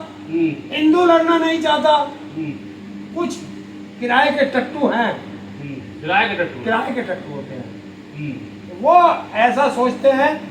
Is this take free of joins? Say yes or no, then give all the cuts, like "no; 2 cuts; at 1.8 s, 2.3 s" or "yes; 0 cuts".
yes; 0 cuts